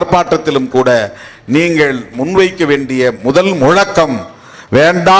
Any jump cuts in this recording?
no; 0 cuts

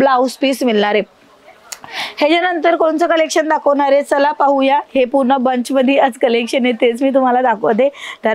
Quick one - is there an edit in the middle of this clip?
no; 0 cuts

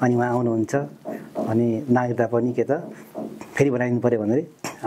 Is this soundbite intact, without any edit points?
yes; 0 cuts

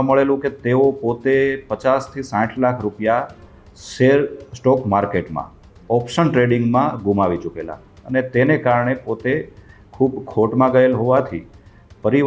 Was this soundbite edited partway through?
no; 0 cuts

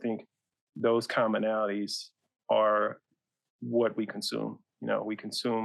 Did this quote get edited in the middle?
no; 0 cuts

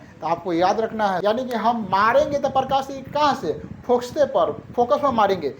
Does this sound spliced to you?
yes; 1 cut; at 1.2 s

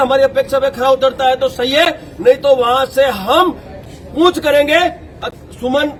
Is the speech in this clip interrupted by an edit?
no; 0 cuts

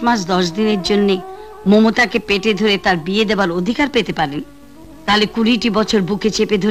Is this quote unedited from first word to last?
yes; 0 cuts

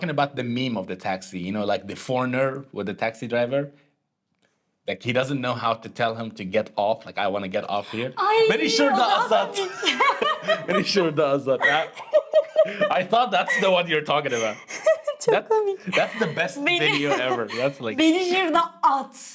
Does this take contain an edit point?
no; 0 cuts

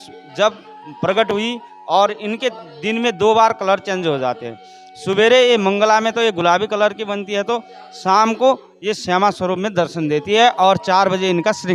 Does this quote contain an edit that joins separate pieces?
no; 0 cuts

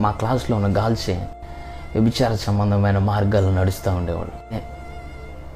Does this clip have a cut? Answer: no; 0 cuts

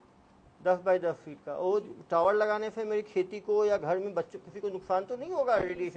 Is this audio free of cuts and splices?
yes; 0 cuts

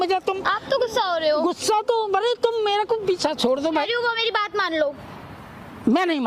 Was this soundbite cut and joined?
yes; 1 cut; at 3.9 s

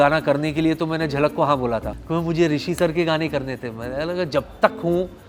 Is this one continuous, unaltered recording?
yes; 0 cuts

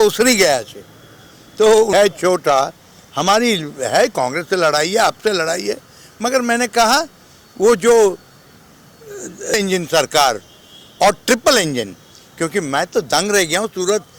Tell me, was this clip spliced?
yes; 2 cuts; at 1.9 s, 9.5 s

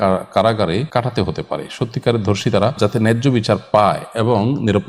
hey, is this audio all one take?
no; 2 cuts; at 0.9 s, 2.8 s

